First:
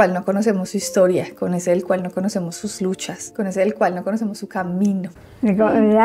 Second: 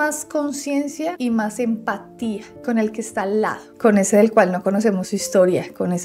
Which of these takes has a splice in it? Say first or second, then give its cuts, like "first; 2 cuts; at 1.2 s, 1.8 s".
first; 1 cut; at 5.1 s